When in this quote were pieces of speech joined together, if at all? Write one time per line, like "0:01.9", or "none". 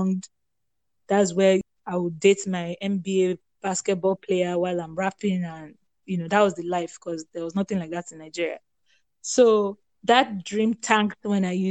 0:01.7